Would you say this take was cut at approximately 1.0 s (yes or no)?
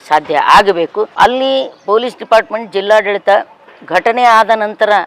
yes